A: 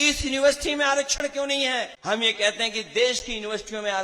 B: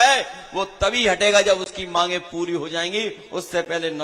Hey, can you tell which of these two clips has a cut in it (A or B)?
A